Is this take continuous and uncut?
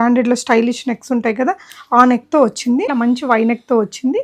no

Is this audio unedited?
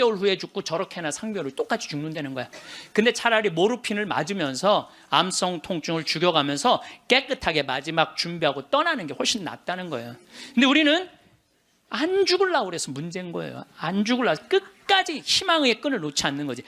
yes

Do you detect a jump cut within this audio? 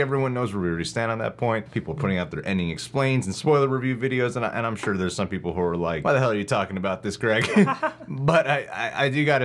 yes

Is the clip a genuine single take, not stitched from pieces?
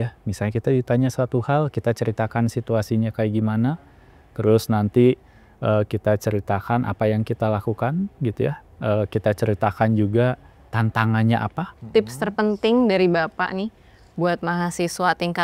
no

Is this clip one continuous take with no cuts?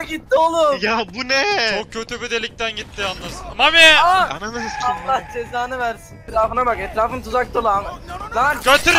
no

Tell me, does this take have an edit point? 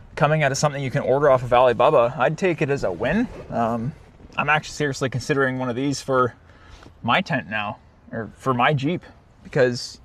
no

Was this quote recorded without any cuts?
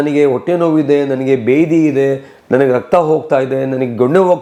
yes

